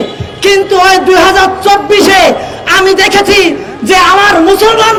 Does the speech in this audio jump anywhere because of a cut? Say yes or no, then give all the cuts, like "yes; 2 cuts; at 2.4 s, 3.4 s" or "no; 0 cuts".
no; 0 cuts